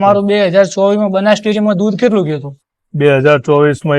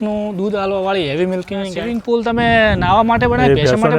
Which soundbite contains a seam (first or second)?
second